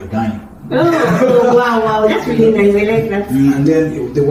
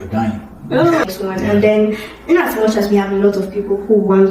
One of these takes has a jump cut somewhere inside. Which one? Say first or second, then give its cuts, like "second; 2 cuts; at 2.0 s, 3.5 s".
second; 1 cut; at 1.0 s